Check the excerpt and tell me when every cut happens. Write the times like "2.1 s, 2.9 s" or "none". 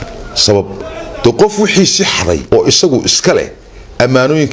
2.4 s